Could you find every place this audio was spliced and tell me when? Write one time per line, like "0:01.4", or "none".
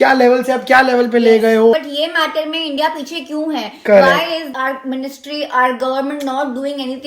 0:01.7
0:04.5